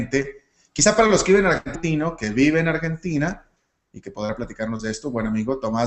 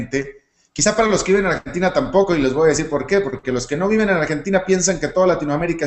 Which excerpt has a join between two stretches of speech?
second; 1 cut; at 1.8 s

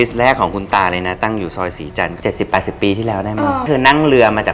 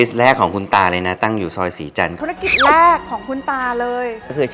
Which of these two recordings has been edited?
second; 1 cut; at 2.2 s

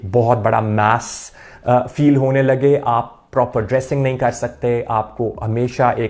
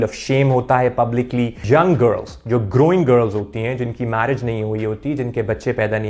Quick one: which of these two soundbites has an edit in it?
second; 1 cut; at 1.6 s

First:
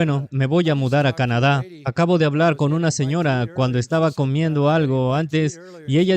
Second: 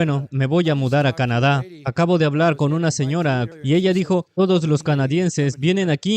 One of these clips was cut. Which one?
second; 1 cut; at 3.5 s

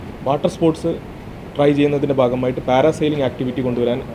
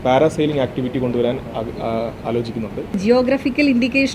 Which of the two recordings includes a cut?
second; 1 cut; at 3.0 s

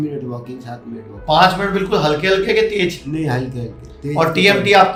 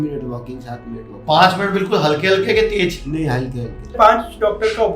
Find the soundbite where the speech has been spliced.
second; 1 cut; at 3.9 s

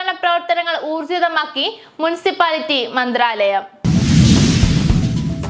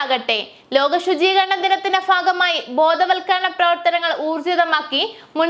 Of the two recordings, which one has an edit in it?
first; 1 cut; at 3.7 s

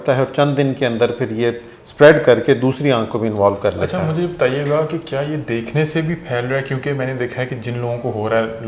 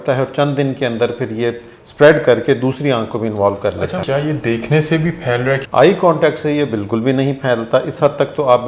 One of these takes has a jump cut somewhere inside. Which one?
second; 2 cuts; at 4.0 s, 5.6 s

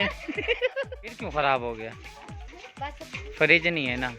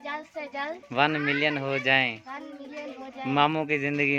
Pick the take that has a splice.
first; 1 cut; at 1.1 s

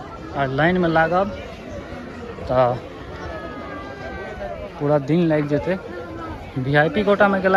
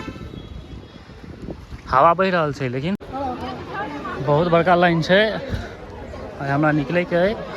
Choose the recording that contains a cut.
second; 1 cut; at 3.0 s

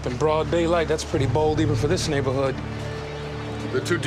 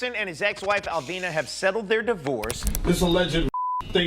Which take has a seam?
second; 1 cut; at 2.6 s

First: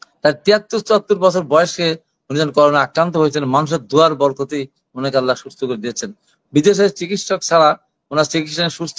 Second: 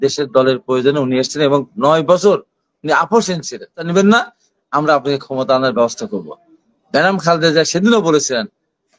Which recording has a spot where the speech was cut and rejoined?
second; 1 cut; at 3.9 s

